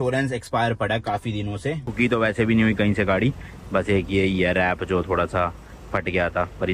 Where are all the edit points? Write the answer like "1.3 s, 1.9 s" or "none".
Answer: 1.8 s